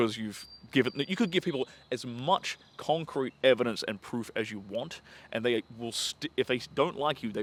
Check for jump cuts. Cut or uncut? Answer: uncut